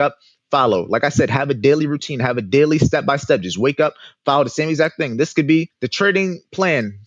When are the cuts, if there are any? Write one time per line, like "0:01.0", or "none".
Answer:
0:05.8